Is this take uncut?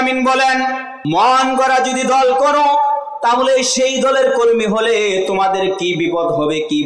no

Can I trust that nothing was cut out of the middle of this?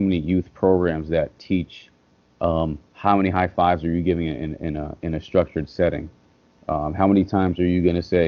yes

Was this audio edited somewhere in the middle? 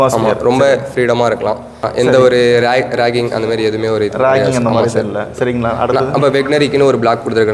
yes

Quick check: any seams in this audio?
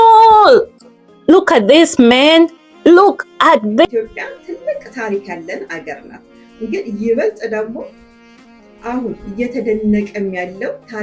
yes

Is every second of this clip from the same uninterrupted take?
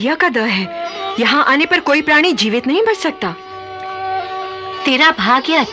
yes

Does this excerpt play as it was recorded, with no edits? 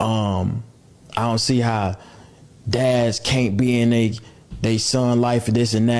yes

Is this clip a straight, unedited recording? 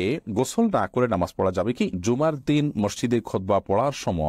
no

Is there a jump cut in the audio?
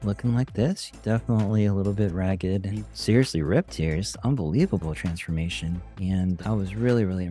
yes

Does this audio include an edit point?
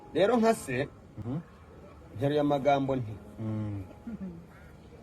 yes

